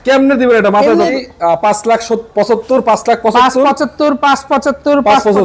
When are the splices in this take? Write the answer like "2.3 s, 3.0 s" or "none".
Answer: 1.1 s